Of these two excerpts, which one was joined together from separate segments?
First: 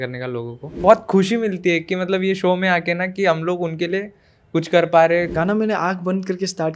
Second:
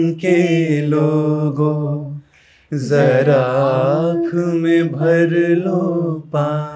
first; 2 cuts; at 0.8 s, 5.3 s

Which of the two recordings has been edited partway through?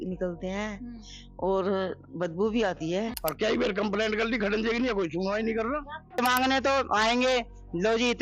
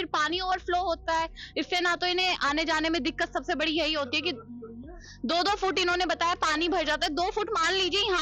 first; 2 cuts; at 3.1 s, 6.2 s

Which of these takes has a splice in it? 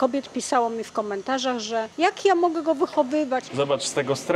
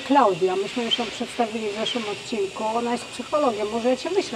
first; 1 cut; at 3.4 s

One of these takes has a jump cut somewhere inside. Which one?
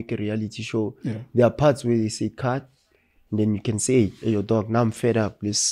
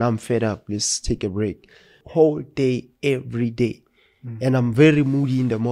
second; 1 cut; at 2.0 s

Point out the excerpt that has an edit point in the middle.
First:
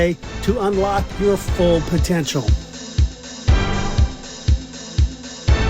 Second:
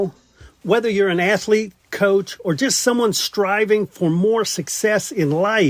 first; 1 cut; at 2.5 s

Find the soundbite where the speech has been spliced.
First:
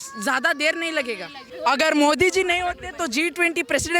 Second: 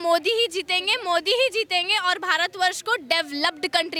first; 1 cut; at 1.4 s

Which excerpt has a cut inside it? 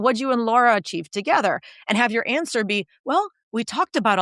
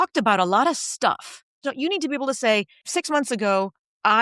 second; 2 cuts; at 1.6 s, 2.8 s

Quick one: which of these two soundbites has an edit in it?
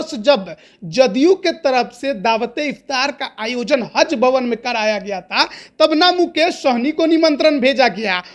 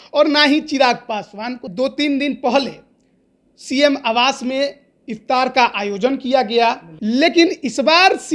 second; 2 cuts; at 1.6 s, 6.9 s

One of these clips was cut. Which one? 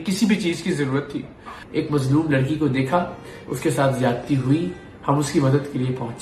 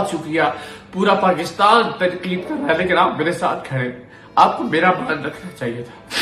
first; 1 cut; at 1.5 s

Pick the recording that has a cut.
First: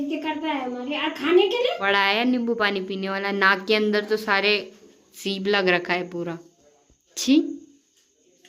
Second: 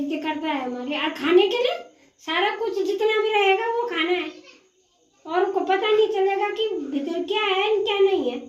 first; 1 cut; at 1.9 s

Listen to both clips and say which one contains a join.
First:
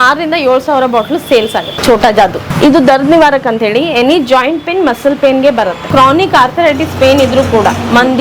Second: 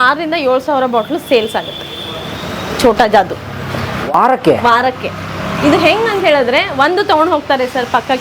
first; 3 cuts; at 1.7 s, 2.5 s, 5.8 s

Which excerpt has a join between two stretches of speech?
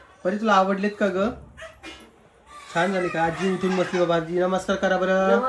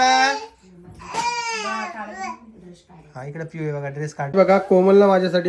second; 1 cut; at 4.3 s

